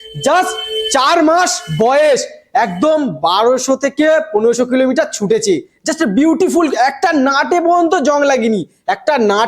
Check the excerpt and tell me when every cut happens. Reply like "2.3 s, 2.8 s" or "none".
none